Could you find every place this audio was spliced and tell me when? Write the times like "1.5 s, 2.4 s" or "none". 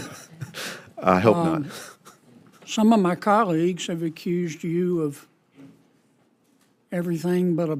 none